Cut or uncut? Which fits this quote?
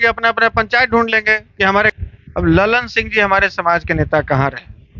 cut